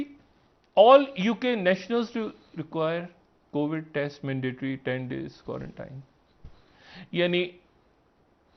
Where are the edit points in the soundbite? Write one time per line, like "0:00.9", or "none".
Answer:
none